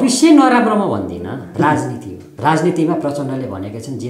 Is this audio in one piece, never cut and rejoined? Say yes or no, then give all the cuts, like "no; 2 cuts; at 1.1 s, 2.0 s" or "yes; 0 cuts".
no; 2 cuts; at 1.4 s, 2.2 s